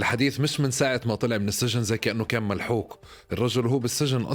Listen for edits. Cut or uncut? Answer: uncut